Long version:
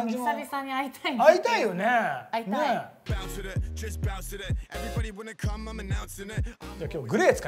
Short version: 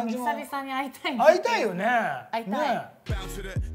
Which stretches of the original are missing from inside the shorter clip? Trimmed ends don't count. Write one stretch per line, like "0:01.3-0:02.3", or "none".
none